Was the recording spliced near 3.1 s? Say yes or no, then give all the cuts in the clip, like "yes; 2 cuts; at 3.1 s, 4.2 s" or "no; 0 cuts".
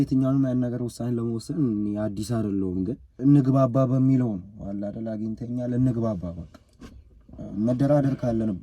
yes; 1 cut; at 3.1 s